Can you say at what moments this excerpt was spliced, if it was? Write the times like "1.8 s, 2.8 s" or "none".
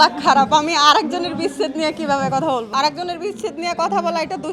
2.7 s